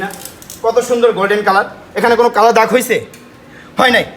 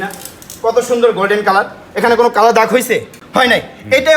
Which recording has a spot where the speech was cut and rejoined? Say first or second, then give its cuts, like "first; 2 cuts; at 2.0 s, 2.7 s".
second; 1 cut; at 3.2 s